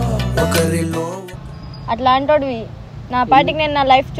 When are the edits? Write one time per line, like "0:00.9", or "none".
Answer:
none